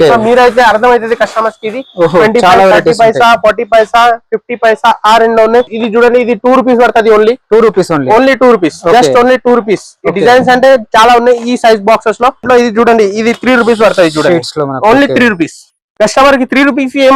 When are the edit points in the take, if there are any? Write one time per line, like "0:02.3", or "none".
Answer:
0:05.8
0:12.4